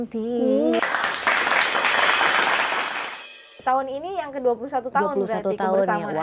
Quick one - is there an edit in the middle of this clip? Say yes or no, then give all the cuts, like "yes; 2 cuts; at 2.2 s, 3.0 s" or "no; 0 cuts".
yes; 1 cut; at 3.5 s